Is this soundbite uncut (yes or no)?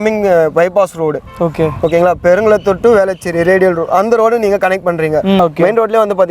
no